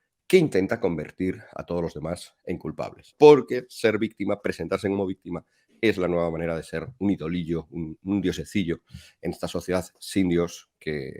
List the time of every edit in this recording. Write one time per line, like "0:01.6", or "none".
0:03.1